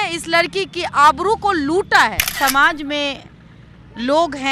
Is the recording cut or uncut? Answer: cut